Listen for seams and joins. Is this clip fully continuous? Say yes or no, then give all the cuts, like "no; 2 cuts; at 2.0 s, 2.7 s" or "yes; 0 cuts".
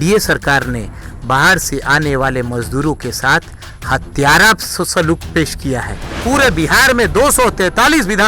no; 1 cut; at 6.2 s